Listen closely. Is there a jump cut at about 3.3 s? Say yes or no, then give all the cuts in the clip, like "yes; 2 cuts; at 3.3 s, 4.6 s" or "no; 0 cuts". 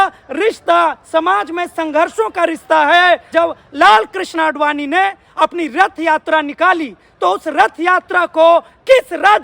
yes; 1 cut; at 3.3 s